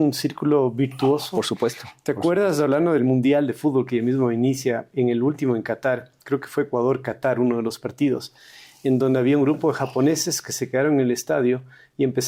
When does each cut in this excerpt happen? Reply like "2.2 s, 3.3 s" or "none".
none